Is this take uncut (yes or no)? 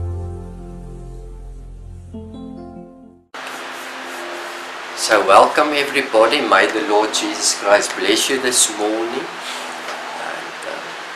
no